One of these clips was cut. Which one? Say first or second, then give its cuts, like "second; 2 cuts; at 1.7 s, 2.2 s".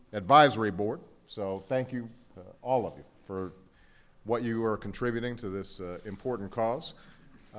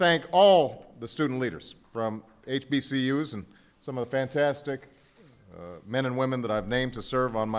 second; 1 cut; at 6.2 s